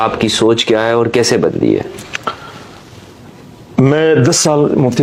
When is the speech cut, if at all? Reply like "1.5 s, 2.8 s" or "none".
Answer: none